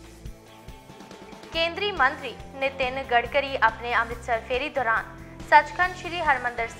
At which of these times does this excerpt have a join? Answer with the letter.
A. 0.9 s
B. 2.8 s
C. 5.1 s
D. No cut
A